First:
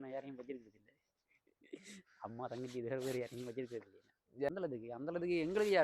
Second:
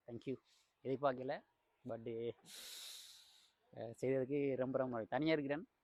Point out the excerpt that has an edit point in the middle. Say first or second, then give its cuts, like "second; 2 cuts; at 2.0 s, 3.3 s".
first; 1 cut; at 4.5 s